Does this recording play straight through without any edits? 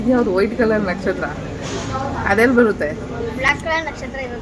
yes; 0 cuts

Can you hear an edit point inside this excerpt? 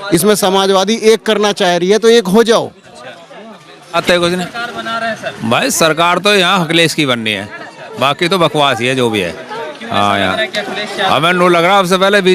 no; 0 cuts

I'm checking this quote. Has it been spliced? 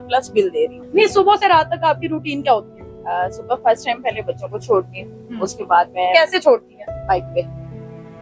no; 0 cuts

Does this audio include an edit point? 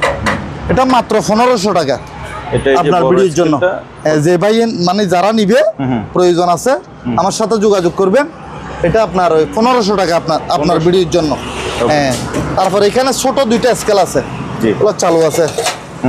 no; 0 cuts

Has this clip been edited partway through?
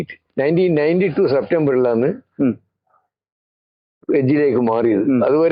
no; 0 cuts

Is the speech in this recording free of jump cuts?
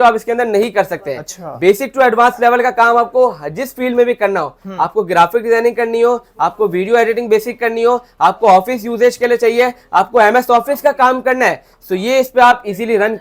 yes; 0 cuts

